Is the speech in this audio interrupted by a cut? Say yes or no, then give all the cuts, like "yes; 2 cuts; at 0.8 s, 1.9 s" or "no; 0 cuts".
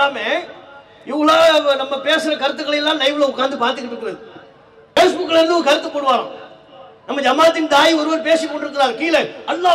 yes; 1 cut; at 5.0 s